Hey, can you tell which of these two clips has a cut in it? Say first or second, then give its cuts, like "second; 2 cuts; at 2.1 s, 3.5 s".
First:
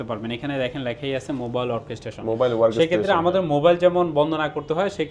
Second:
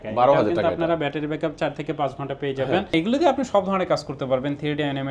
second; 1 cut; at 2.9 s